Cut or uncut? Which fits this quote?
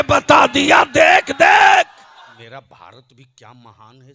cut